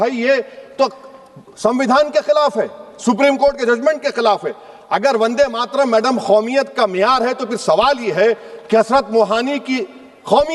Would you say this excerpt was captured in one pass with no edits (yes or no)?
yes